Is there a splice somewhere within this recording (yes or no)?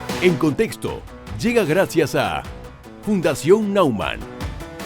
no